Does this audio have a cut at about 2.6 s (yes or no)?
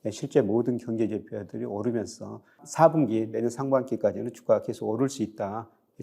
yes